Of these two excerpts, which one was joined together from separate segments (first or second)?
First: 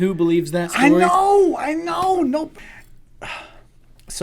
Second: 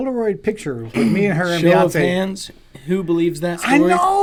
first